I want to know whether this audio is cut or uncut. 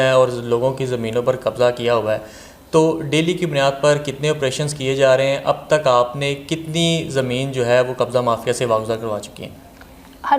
uncut